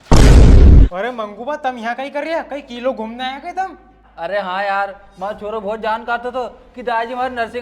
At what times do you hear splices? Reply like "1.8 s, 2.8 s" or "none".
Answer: 0.9 s